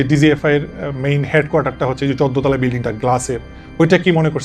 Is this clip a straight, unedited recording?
yes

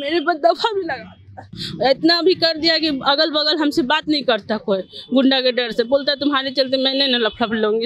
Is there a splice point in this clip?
yes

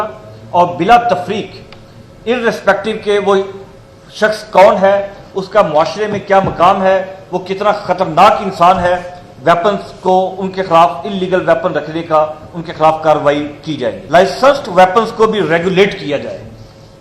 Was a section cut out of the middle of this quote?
yes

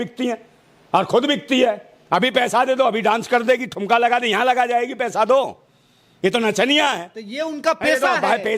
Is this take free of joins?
yes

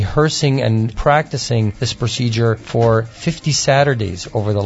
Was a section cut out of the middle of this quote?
yes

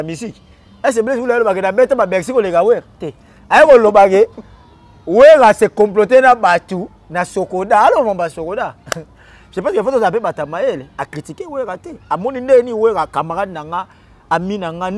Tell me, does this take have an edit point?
no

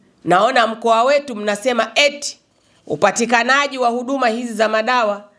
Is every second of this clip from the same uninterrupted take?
yes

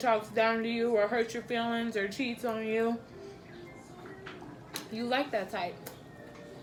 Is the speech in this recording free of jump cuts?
yes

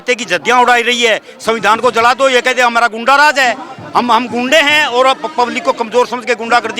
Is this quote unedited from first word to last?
yes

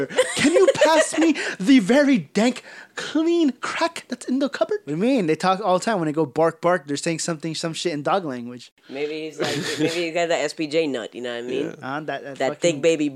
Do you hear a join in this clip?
yes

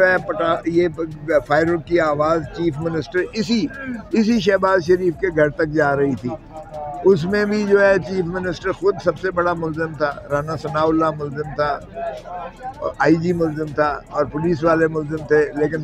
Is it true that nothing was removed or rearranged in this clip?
yes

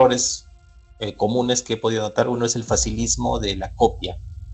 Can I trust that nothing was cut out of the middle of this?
yes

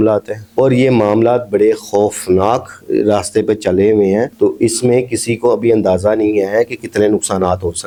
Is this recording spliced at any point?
no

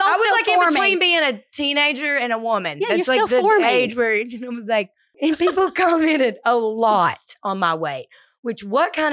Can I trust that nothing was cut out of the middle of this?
no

